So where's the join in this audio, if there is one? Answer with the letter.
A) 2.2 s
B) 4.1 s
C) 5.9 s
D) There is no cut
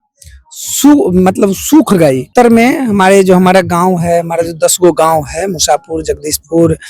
A